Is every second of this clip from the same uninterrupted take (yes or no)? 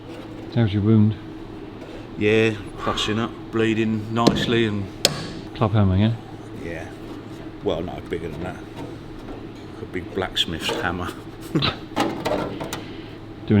no